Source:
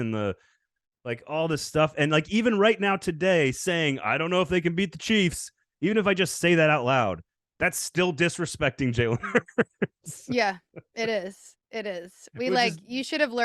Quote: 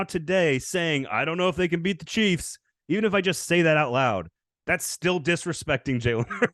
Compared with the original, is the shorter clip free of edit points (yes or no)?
yes